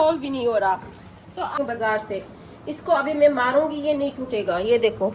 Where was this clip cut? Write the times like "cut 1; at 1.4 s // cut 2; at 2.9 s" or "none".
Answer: cut 1; at 1.6 s